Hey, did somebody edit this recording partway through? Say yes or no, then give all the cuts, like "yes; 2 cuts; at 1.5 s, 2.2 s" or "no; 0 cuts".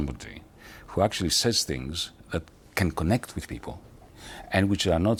no; 0 cuts